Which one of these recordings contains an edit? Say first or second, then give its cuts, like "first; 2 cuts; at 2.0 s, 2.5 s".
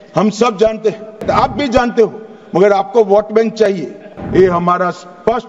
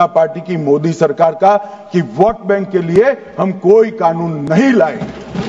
first; 2 cuts; at 1.2 s, 4.1 s